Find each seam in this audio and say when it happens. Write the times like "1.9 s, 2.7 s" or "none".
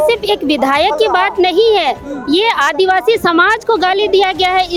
none